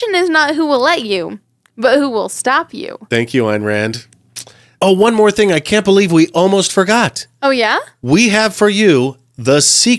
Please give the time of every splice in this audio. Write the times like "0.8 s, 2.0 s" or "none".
none